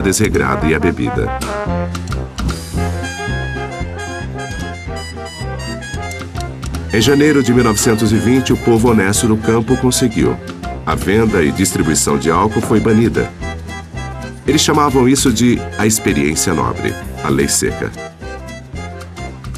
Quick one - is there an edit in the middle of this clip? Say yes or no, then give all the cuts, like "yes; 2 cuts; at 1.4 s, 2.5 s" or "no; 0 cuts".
no; 0 cuts